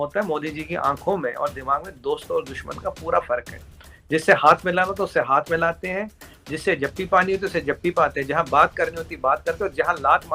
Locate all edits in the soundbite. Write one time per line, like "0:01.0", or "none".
none